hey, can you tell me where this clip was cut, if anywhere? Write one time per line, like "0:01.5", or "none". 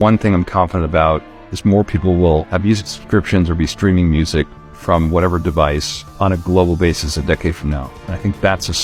none